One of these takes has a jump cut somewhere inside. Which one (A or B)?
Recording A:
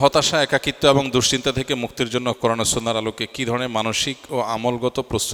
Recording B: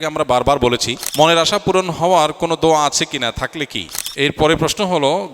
B